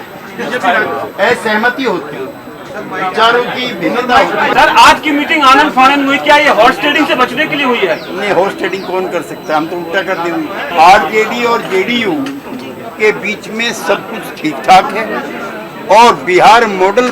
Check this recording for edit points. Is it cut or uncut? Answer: cut